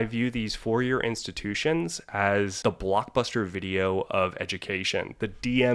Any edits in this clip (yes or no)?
yes